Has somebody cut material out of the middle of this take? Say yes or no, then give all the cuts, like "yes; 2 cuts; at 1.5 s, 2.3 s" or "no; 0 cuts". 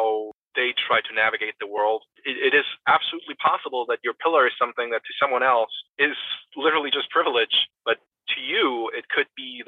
yes; 1 cut; at 8.0 s